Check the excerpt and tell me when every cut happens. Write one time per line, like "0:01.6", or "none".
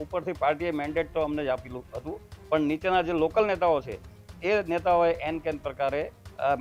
none